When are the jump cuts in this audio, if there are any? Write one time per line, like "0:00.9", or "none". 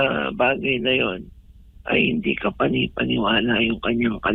none

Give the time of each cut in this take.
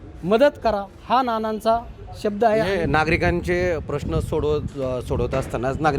none

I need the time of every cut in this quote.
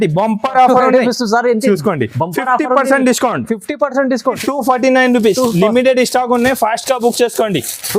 0:04.4

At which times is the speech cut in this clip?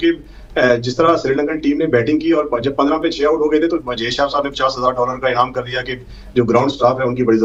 none

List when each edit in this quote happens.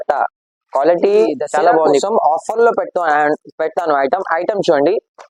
0:02.0

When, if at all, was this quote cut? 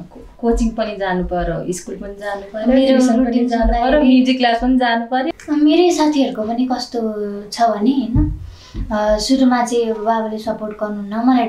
0:05.3

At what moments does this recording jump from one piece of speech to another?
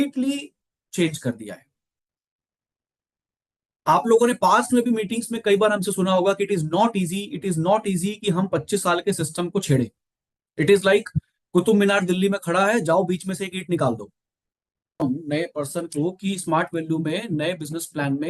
0:15.0

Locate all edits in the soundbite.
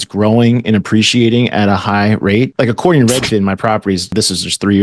0:02.5
0:04.1

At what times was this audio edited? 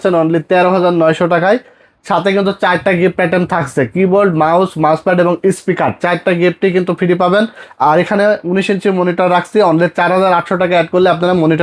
none

